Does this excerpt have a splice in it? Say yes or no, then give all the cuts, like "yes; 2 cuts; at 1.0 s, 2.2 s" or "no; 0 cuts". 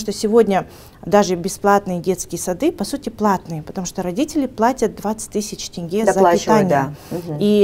no; 0 cuts